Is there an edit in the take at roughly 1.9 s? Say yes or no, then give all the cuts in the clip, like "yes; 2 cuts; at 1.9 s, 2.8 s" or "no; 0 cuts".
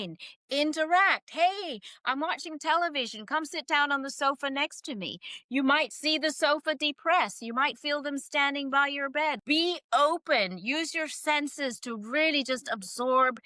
no; 1 cut; at 9.4 s